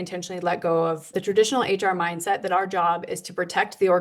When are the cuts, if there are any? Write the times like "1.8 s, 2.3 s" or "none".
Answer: 1.2 s